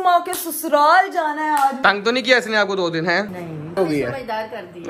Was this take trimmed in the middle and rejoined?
yes; 2 cuts; at 1.8 s, 3.8 s

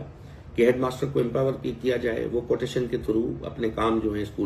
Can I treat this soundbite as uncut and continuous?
yes; 0 cuts

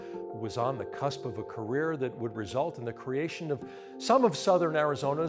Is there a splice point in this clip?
yes; 1 cut; at 1.6 s

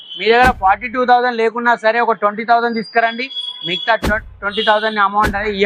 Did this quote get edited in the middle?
no; 0 cuts

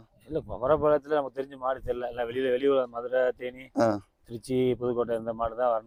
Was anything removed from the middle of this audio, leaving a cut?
no; 0 cuts

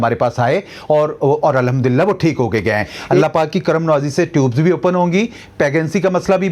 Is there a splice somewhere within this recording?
yes; 1 cut; at 3.2 s

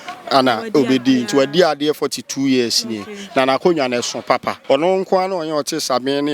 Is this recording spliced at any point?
yes; 1 cut; at 4.5 s

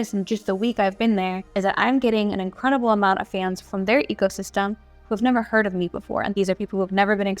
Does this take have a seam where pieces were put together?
yes; 3 cuts; at 1.4 s, 3.7 s, 6.3 s

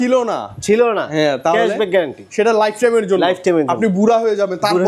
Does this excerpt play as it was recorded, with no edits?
yes; 0 cuts

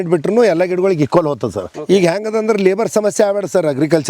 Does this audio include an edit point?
yes; 1 cut; at 1.9 s

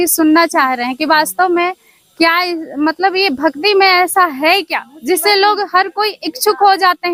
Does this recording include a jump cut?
no; 0 cuts

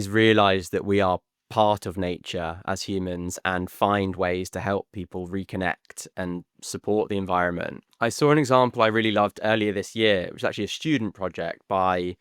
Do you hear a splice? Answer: yes; 1 cut; at 7.9 s

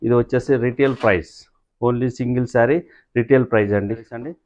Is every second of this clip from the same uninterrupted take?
yes; 0 cuts

